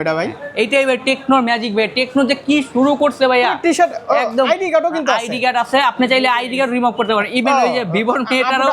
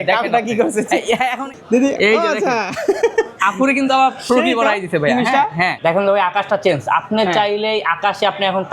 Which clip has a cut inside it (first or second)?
second